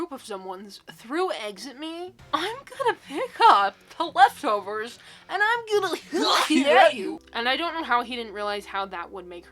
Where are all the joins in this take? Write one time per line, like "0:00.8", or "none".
0:07.1